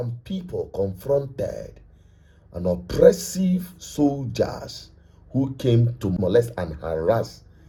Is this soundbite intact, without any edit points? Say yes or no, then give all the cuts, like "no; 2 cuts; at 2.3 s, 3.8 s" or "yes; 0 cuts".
yes; 0 cuts